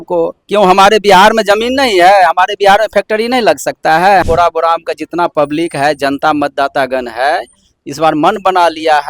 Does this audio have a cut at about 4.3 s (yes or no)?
yes